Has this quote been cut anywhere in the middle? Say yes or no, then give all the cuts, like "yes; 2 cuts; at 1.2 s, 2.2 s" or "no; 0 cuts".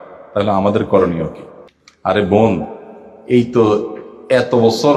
no; 0 cuts